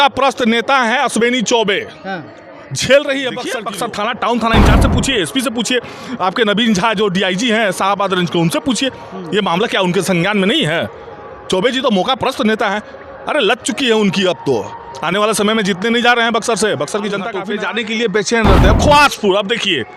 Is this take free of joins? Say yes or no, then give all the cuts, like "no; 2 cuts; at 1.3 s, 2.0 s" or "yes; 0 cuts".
no; 2 cuts; at 3.6 s, 17.4 s